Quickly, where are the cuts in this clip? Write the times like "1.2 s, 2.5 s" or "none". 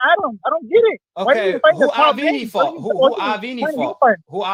none